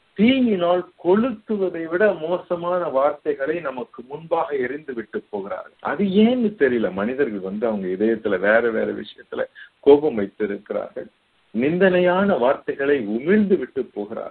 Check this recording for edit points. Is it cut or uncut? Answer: uncut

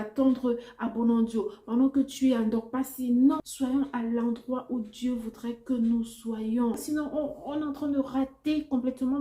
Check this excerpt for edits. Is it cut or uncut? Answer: cut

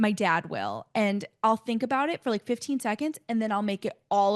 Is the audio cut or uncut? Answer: uncut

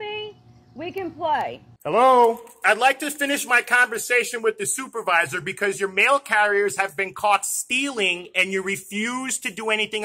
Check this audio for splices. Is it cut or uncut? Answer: cut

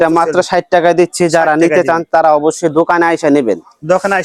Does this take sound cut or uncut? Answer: uncut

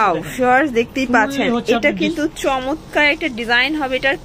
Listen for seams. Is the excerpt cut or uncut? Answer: uncut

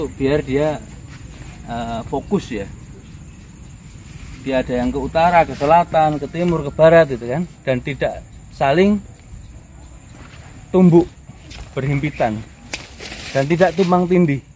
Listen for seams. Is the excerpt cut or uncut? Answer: uncut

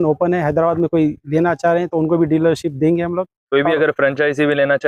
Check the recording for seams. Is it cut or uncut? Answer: uncut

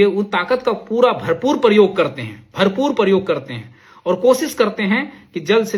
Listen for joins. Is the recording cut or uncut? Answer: uncut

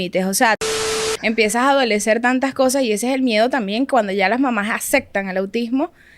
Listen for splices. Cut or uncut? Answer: cut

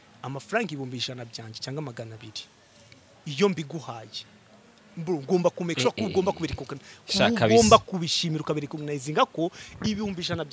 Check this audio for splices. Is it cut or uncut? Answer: uncut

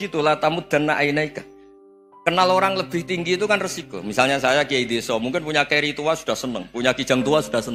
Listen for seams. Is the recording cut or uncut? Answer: uncut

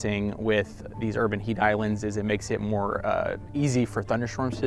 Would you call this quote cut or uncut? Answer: uncut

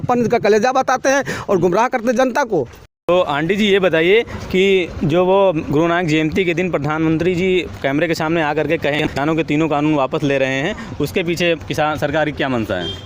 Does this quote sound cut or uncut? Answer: cut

